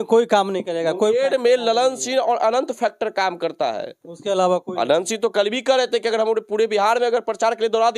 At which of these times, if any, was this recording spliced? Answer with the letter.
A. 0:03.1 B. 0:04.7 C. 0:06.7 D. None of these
D